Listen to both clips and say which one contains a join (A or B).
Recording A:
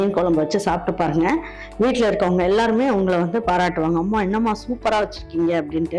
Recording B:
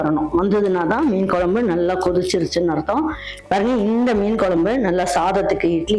B